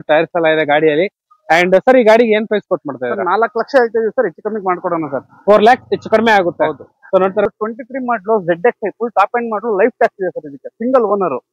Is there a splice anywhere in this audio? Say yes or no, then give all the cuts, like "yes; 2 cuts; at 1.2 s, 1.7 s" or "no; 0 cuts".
yes; 1 cut; at 7.5 s